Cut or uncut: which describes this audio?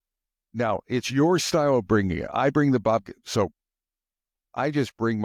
uncut